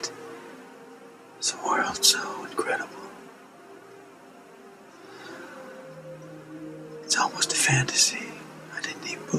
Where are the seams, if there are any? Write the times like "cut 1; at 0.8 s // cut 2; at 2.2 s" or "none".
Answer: cut 1; at 4.7 s